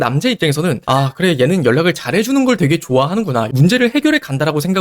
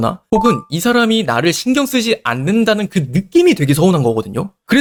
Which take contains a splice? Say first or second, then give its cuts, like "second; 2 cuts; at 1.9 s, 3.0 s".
first; 1 cut; at 3.5 s